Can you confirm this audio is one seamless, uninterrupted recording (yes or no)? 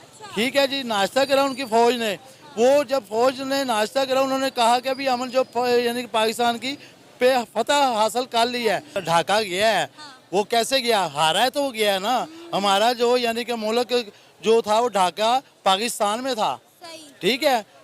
no